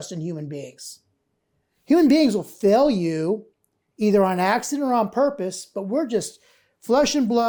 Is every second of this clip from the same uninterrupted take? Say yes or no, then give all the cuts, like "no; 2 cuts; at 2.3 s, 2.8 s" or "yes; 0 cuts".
yes; 0 cuts